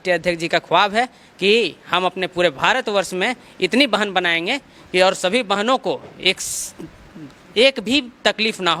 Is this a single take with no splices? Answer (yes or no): yes